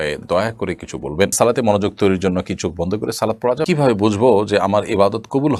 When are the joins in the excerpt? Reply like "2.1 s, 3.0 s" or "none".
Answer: 1.3 s, 3.6 s